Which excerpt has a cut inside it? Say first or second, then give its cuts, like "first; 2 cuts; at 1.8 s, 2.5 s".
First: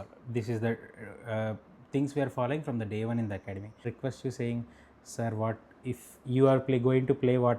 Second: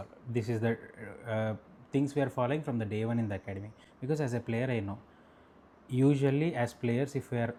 first; 1 cut; at 3.9 s